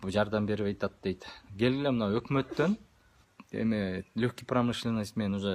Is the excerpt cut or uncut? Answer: cut